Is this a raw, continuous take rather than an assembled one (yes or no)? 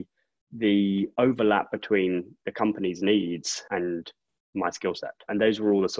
no